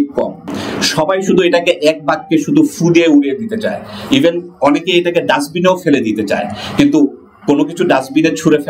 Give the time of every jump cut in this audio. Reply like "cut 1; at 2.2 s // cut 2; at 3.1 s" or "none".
none